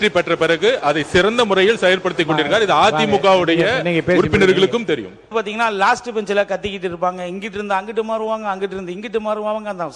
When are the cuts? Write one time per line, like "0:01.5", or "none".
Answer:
0:05.3